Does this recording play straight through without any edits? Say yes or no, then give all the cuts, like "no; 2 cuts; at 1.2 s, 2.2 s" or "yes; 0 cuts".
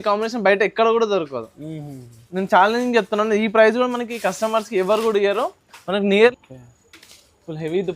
no; 1 cut; at 6.3 s